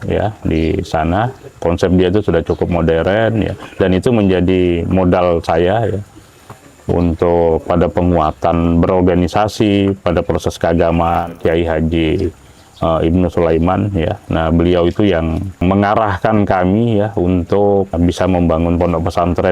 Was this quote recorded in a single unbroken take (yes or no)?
no